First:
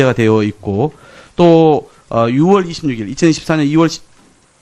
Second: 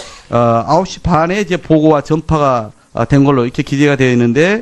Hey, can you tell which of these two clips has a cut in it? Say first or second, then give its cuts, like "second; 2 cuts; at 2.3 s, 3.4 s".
second; 1 cut; at 3.0 s